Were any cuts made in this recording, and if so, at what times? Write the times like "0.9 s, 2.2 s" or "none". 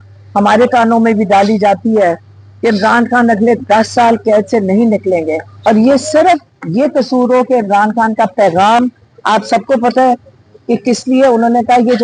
5.5 s